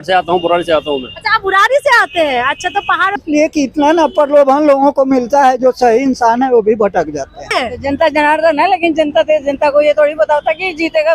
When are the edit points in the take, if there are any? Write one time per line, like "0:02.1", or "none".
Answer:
0:03.2
0:07.5